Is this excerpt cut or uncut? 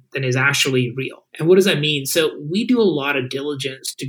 cut